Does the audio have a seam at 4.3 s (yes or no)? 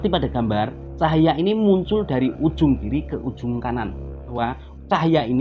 yes